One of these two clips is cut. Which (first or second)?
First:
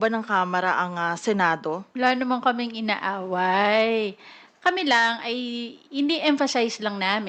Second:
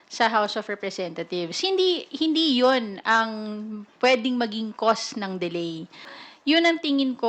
second